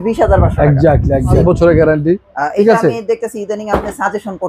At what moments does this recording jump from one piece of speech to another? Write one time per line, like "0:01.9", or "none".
0:01.4